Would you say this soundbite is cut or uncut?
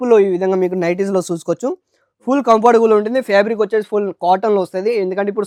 uncut